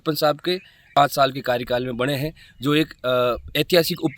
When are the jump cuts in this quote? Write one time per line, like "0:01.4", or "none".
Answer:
0:01.0